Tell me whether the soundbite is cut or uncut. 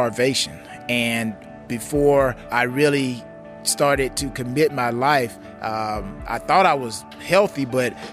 cut